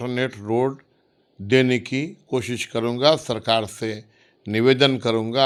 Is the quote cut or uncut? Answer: uncut